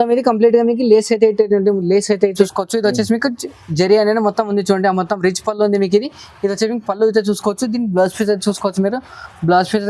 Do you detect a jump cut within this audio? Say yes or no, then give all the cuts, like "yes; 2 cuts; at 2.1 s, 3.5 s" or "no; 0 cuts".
yes; 1 cut; at 2.5 s